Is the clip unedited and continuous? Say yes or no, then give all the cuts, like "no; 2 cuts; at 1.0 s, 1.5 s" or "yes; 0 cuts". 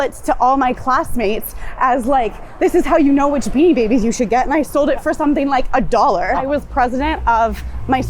no; 1 cut; at 6.4 s